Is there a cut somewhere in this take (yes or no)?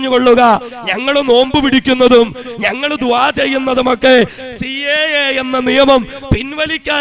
no